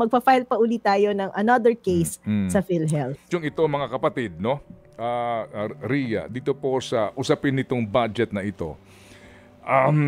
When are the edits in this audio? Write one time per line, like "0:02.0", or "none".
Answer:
0:03.2